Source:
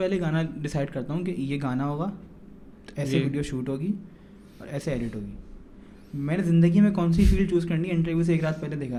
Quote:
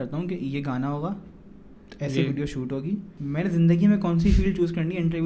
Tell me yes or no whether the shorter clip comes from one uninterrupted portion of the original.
no